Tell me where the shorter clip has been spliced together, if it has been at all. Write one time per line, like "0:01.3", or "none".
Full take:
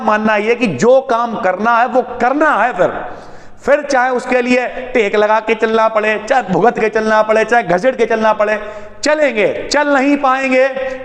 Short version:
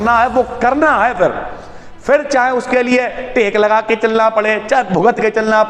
none